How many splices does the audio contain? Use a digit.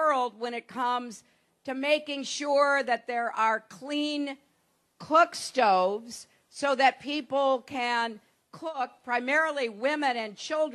0